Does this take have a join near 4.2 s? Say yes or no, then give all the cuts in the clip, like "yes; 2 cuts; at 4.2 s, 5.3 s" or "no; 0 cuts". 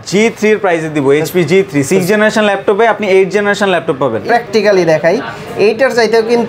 yes; 1 cut; at 4.2 s